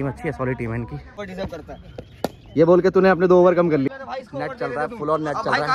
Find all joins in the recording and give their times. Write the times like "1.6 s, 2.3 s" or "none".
1.2 s, 3.9 s